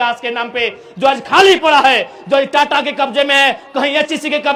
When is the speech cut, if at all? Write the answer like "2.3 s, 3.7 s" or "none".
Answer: none